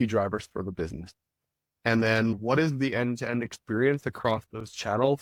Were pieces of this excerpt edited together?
no; 0 cuts

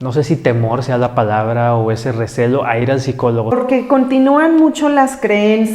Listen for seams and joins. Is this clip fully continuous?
no; 1 cut; at 3.5 s

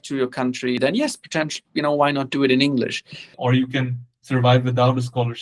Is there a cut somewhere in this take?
yes; 2 cuts; at 0.8 s, 3.4 s

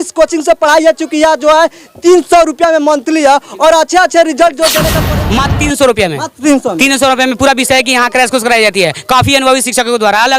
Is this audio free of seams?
no; 1 cut; at 4.9 s

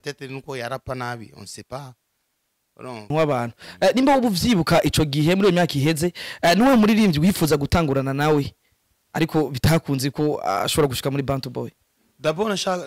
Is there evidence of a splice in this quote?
yes; 1 cut; at 3.1 s

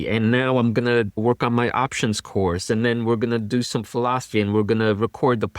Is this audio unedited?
no; 1 cut; at 1.2 s

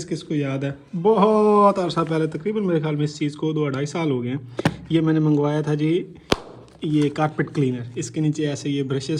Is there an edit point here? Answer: no; 0 cuts

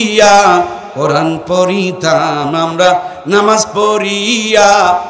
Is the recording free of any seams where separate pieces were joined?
yes; 0 cuts

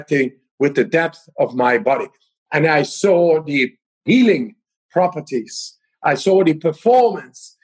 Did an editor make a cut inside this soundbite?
no; 0 cuts

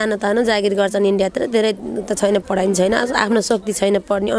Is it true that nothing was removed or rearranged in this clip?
yes; 0 cuts

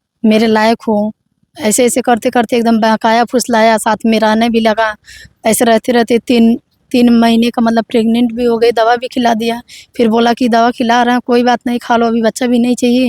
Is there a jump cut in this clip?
no; 0 cuts

